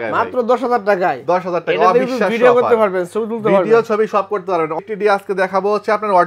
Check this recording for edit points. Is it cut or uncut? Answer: cut